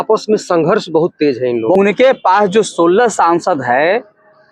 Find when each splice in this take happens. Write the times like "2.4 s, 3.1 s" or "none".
1.8 s

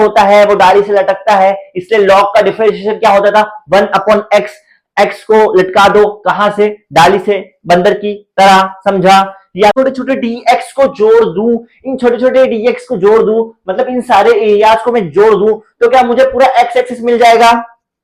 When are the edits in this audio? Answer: 9.7 s

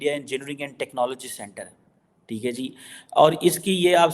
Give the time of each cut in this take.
none

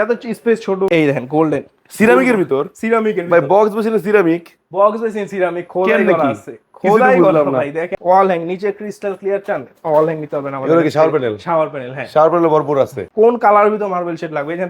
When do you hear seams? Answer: 0.9 s, 7.9 s, 13.0 s

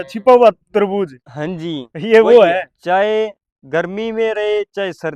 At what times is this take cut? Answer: 2.7 s

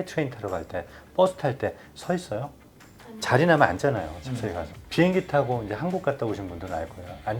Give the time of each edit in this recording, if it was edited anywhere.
4.9 s

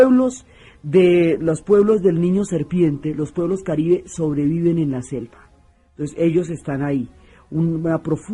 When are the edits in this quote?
none

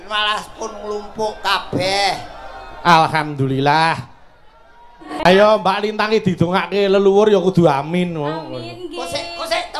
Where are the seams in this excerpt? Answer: 5.1 s

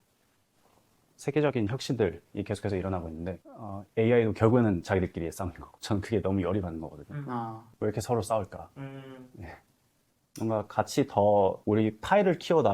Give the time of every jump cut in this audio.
7.6 s

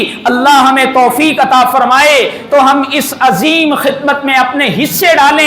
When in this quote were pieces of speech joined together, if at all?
none

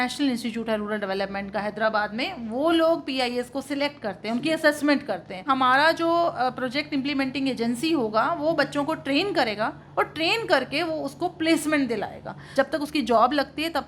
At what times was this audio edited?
5.4 s, 12.4 s

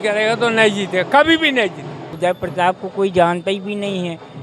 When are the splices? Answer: 2.1 s

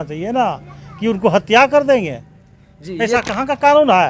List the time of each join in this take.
none

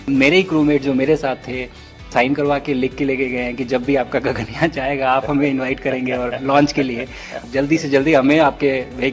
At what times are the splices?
2.1 s, 7.4 s

